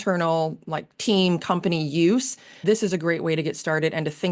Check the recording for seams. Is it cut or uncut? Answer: cut